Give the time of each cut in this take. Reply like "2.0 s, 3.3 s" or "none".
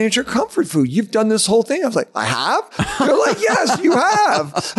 none